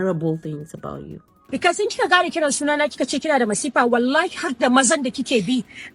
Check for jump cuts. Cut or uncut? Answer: cut